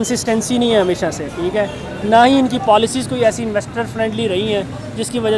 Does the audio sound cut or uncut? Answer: uncut